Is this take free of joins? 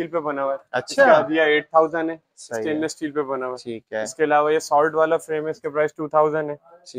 yes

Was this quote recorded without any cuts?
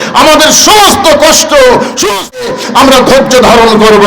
no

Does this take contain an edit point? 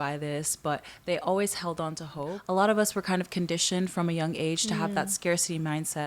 yes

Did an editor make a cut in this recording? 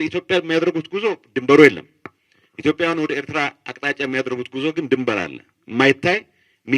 no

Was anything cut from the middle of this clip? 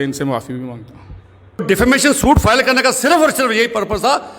yes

